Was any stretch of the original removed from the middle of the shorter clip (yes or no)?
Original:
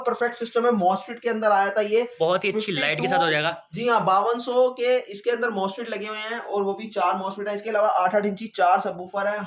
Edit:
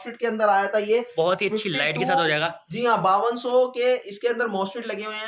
no